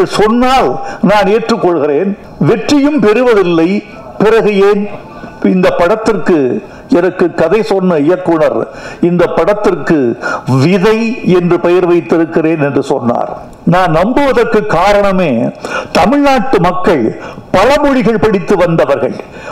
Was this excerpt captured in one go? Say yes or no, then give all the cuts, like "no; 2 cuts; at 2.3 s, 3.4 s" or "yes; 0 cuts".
no; 1 cut; at 13.5 s